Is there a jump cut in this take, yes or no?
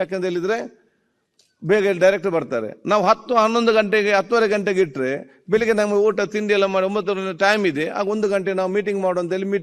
no